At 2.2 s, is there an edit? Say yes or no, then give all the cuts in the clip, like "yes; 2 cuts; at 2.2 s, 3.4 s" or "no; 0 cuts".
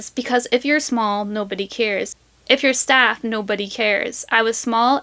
yes; 1 cut; at 2.2 s